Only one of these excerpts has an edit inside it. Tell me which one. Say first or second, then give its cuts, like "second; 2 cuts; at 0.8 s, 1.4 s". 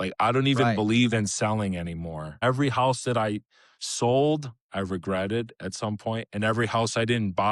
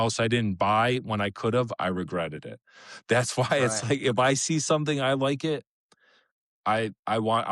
first; 1 cut; at 2.3 s